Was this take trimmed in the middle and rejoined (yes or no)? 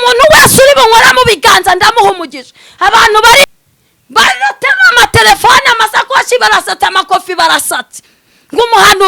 yes